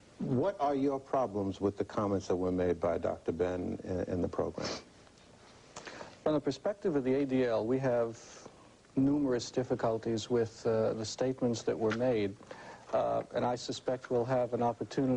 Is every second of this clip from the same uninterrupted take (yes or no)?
yes